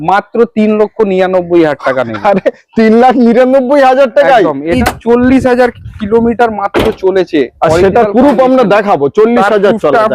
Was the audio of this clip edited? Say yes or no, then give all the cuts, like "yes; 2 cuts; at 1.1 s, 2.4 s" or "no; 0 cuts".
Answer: yes; 1 cut; at 4.7 s